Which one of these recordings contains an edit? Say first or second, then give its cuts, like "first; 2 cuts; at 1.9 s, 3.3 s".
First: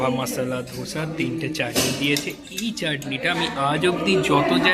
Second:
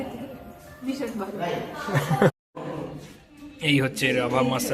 second; 1 cut; at 2.4 s